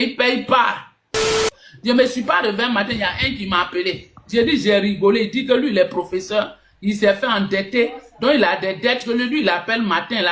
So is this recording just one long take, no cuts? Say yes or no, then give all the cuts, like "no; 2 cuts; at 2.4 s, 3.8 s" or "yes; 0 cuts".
no; 1 cut; at 1.5 s